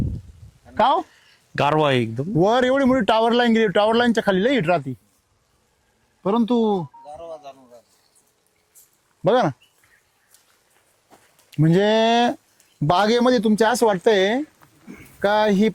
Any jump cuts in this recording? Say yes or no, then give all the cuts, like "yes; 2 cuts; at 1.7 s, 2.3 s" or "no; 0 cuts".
no; 0 cuts